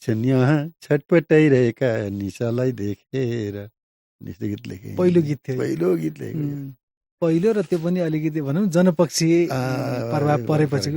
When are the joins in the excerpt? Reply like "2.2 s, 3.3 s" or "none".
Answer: none

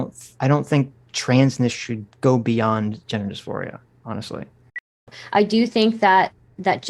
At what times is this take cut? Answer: 5.0 s

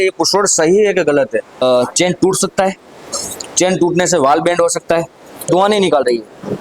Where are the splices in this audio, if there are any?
1.6 s, 5.5 s

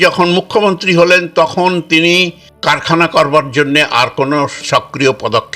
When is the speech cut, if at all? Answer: 2.4 s, 4.6 s

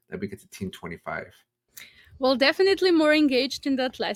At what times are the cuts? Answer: none

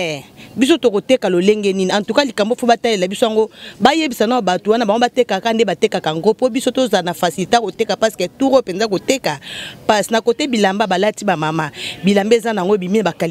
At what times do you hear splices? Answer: none

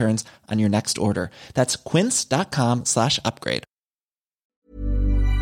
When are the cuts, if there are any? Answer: 4.4 s

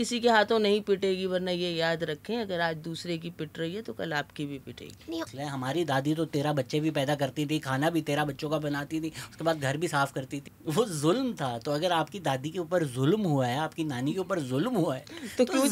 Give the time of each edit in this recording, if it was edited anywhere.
5.3 s, 10.4 s

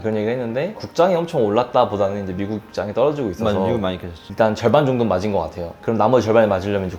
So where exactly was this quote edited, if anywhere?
0.8 s, 4.2 s

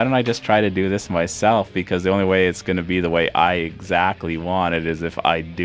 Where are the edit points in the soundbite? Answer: none

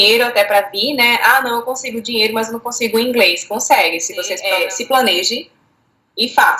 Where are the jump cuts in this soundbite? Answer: 4.4 s

